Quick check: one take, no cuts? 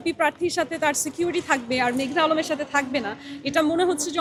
yes; 0 cuts

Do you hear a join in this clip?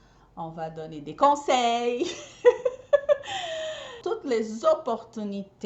yes; 1 cut; at 4.0 s

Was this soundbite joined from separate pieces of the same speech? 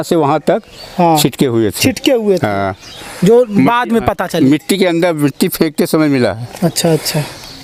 no; 0 cuts

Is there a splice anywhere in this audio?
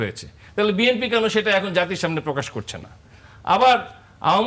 no; 0 cuts

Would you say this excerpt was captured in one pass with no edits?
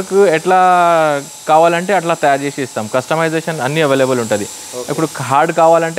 yes; 0 cuts

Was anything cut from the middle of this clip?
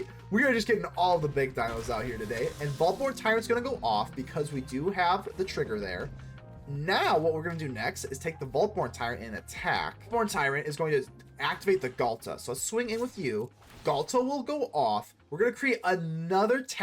yes; 1 cut; at 10.1 s

